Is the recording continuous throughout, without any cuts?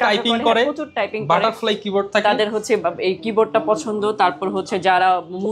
yes; 0 cuts

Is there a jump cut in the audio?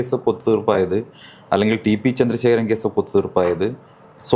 no; 0 cuts

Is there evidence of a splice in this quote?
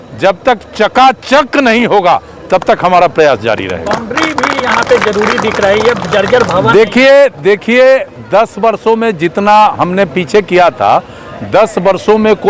no; 0 cuts

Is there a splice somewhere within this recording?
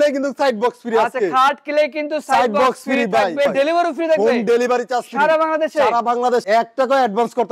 yes; 2 cuts; at 3.5 s, 6.5 s

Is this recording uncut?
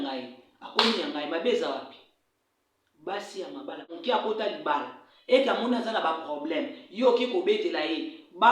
no; 1 cut; at 3.9 s

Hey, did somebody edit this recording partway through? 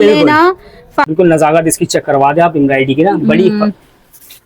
yes; 1 cut; at 1.0 s

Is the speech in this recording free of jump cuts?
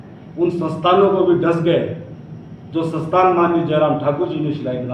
yes; 0 cuts

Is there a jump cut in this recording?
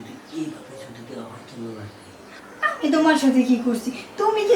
yes; 1 cut; at 2.4 s

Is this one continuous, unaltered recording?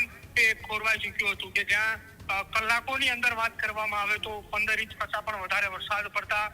yes; 0 cuts

